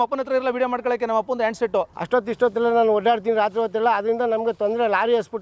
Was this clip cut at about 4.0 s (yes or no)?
no